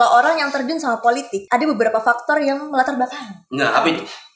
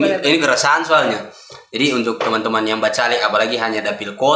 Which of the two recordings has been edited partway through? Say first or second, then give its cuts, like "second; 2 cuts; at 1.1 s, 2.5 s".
first; 1 cut; at 1.4 s